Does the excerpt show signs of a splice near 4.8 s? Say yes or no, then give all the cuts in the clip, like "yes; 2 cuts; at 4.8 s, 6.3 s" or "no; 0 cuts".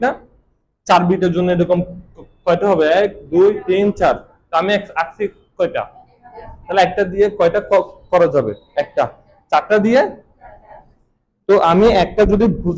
no; 0 cuts